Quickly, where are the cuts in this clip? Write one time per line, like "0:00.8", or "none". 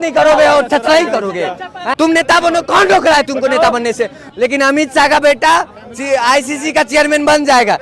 0:01.9
0:04.3